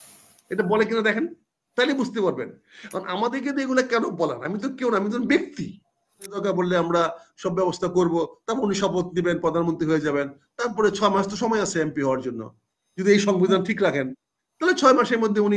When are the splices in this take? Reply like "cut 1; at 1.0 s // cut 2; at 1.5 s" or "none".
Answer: cut 1; at 6.4 s